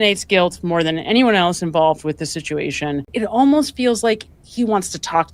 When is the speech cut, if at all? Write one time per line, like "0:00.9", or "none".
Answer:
0:03.1